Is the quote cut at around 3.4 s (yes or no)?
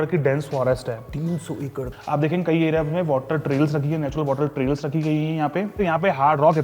no